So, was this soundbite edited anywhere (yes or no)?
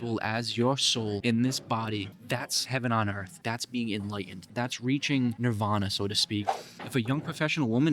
yes